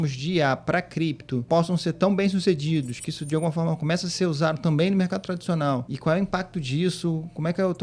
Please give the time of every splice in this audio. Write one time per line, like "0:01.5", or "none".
0:01.5
0:05.9